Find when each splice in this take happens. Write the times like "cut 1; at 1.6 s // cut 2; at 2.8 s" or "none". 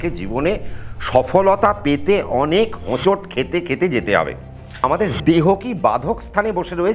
cut 1; at 4.8 s